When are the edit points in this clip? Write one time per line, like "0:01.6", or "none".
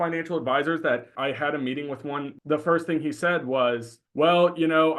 0:01.1
0:02.3
0:04.0